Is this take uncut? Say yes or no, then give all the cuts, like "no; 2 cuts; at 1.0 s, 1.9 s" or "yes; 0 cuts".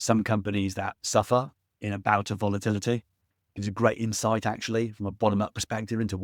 yes; 0 cuts